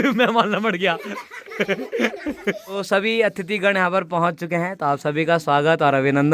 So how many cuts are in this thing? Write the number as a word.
one